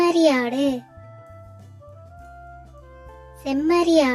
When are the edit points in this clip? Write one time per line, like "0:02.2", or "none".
0:01.1
0:03.4

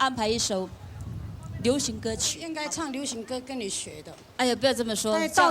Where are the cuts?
0:02.5

